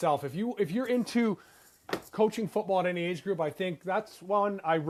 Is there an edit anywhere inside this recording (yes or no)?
no